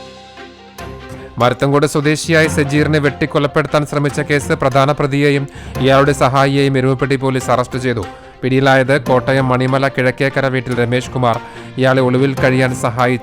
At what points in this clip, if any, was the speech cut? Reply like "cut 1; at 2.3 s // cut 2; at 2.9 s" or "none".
cut 1; at 1.2 s